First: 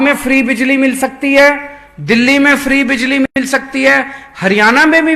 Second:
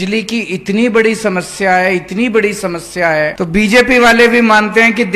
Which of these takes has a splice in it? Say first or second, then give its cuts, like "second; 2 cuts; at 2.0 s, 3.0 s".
second; 1 cut; at 3.3 s